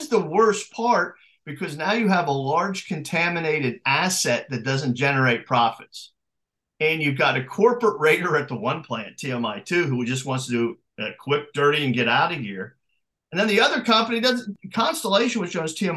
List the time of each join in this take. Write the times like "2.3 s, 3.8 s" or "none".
14.6 s